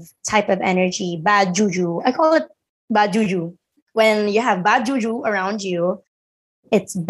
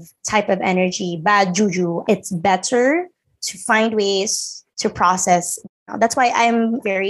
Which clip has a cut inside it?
second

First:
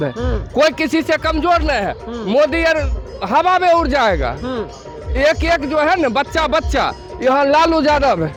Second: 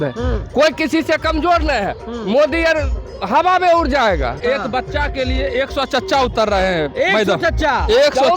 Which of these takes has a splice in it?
second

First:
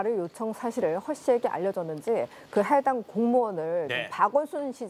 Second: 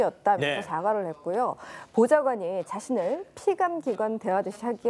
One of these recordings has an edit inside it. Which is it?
second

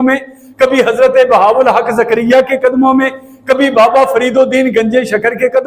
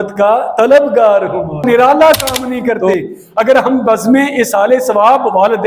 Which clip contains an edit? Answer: second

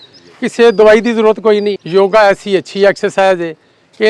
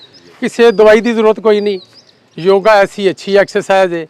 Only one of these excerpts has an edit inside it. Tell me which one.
first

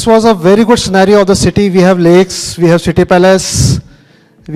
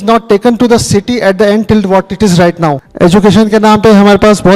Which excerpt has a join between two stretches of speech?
second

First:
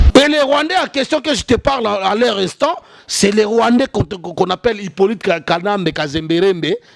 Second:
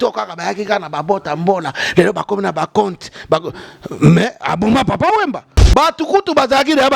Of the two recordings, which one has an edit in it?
second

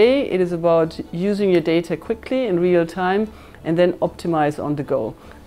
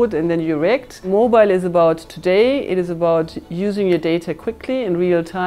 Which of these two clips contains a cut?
second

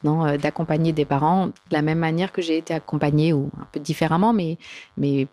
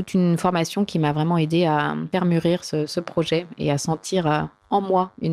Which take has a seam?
second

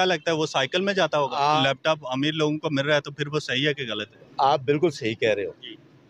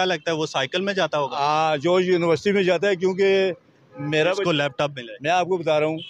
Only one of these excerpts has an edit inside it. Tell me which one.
first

